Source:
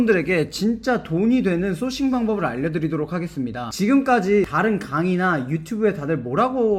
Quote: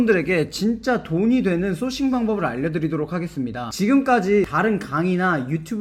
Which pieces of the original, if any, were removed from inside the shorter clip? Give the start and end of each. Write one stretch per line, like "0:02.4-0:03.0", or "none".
none